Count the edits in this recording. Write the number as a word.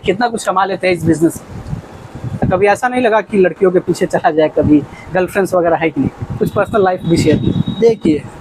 one